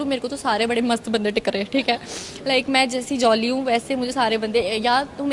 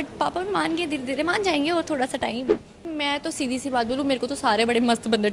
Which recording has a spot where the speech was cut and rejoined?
second; 1 cut; at 2.9 s

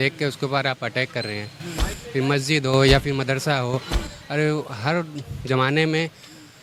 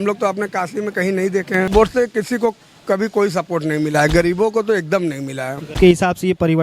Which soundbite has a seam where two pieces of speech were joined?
second; 2 cuts; at 1.7 s, 5.6 s

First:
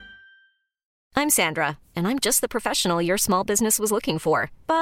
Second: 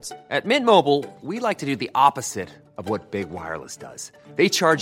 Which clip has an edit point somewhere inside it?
first; 1 cut; at 0.9 s

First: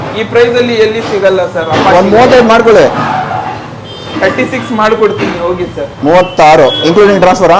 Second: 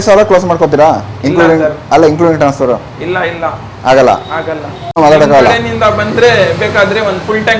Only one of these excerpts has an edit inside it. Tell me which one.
second; 1 cut; at 5.0 s

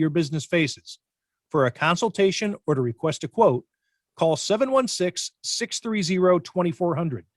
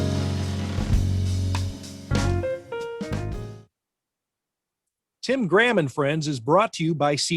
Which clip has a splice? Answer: second; 1 cut; at 3.4 s

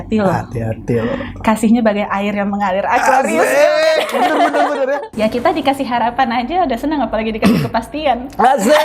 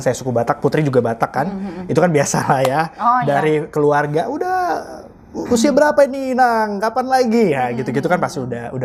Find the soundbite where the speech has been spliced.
first; 1 cut; at 5.1 s

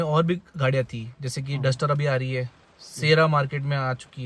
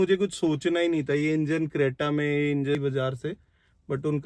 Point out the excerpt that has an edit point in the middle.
second; 1 cut; at 2.8 s

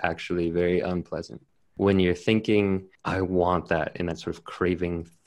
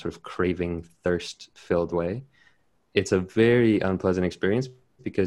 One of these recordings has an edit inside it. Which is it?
first; 2 cuts; at 1.7 s, 2.9 s

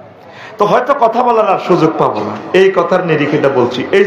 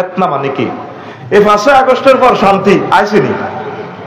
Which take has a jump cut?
second; 1 cut; at 1.1 s

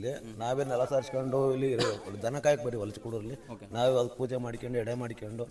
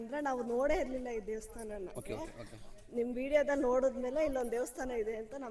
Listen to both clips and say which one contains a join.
second; 1 cut; at 1.9 s

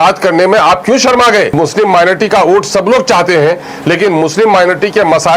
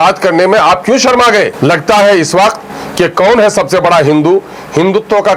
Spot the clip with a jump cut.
first; 1 cut; at 1.5 s

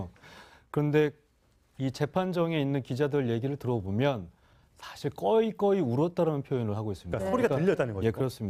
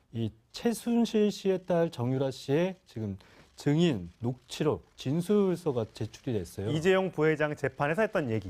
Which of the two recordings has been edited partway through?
second; 1 cut; at 7.5 s

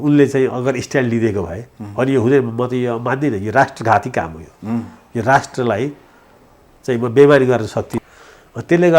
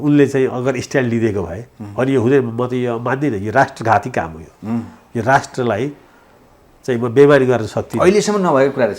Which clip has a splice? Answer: first; 1 cut; at 7.8 s

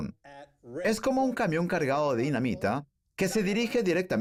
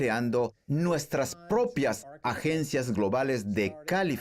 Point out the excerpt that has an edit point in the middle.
second; 1 cut; at 1.2 s

